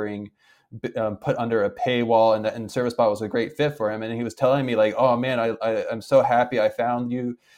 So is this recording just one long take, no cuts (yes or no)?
yes